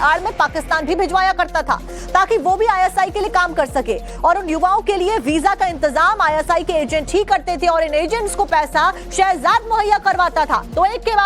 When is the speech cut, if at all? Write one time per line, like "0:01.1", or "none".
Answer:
0:07.3